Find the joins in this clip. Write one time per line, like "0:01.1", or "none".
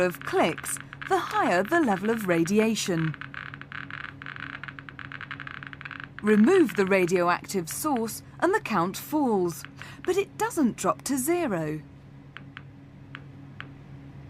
0:02.5